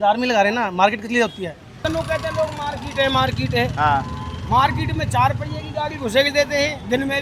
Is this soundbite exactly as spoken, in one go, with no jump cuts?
no; 1 cut; at 1.8 s

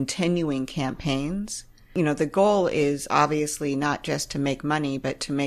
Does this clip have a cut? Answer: yes; 1 cut; at 1.9 s

